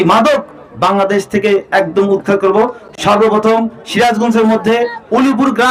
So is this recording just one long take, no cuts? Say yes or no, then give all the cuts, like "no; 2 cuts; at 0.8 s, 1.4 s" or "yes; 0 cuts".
yes; 0 cuts